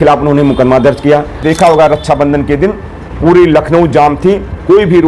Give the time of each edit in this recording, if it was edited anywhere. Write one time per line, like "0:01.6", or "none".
0:01.4

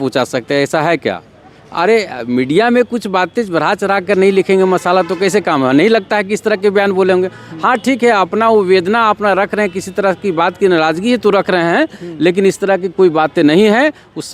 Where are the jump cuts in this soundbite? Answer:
none

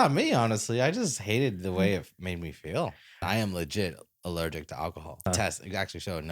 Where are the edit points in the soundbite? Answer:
0:03.2
0:05.3

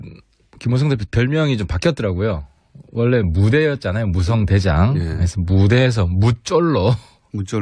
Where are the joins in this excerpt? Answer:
0:01.3

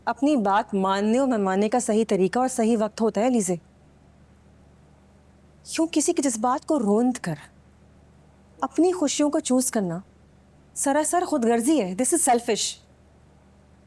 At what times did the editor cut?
0:12.9

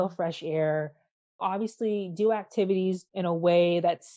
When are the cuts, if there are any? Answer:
0:01.4
0:03.0

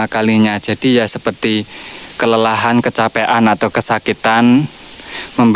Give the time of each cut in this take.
none

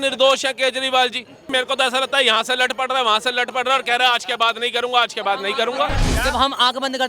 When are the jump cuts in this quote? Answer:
0:01.5
0:06.1

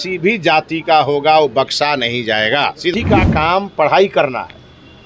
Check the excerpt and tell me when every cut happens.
0:02.9

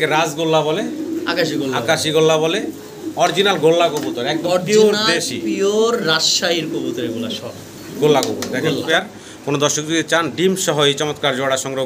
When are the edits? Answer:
0:08.8

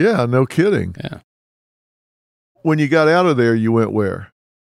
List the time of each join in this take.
none

